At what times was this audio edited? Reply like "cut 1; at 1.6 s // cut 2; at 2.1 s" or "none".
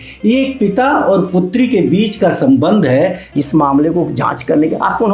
cut 1; at 3.3 s